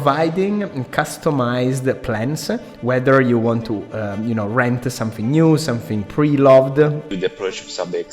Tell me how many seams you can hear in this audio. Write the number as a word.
one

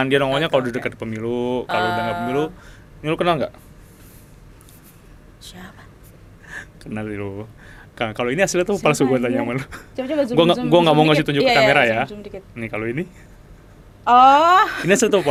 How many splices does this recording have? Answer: zero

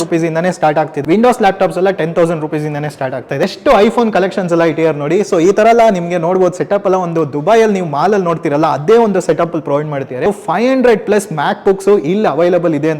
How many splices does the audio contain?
three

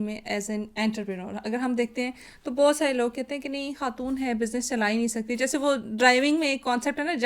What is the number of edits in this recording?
zero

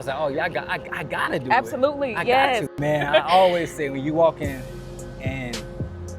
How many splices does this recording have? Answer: one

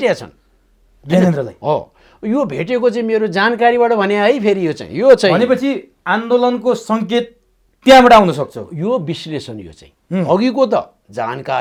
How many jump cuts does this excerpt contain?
zero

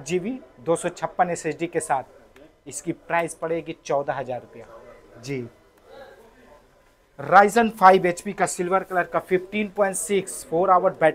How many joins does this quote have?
zero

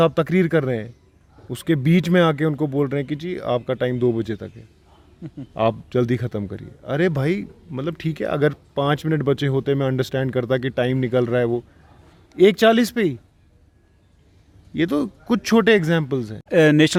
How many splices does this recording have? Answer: zero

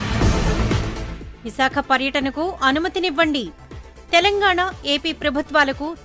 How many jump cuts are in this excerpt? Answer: one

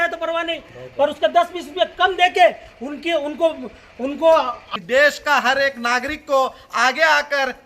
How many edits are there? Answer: one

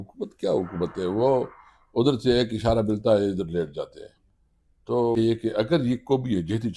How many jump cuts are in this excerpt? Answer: one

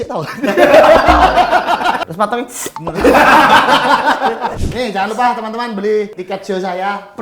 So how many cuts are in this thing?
three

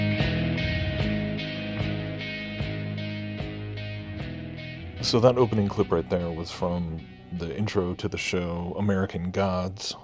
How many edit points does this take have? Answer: zero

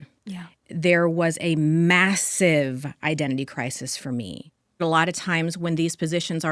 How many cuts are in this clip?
one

